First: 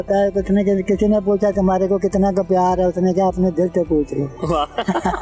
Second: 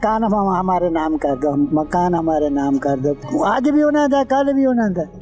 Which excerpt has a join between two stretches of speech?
second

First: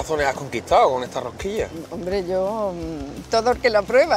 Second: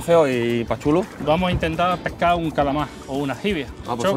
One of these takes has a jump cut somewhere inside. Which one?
second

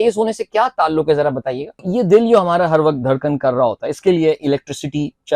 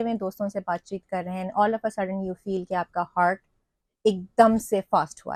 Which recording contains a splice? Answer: first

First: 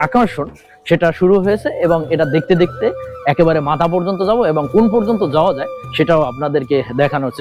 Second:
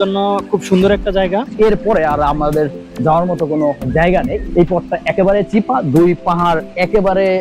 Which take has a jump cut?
second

